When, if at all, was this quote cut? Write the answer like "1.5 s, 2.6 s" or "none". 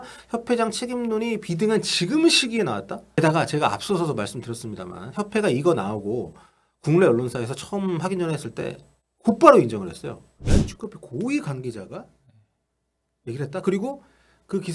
3.0 s, 10.4 s